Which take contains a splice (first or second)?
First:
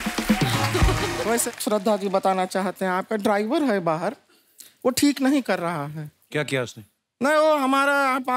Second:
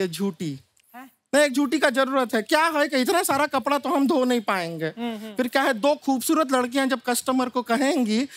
first